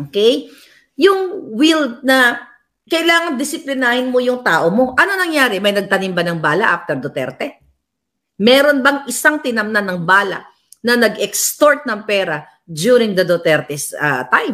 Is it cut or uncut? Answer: uncut